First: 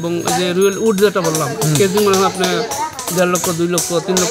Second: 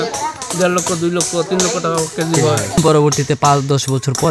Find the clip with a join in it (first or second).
second